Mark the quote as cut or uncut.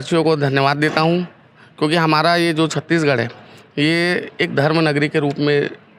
uncut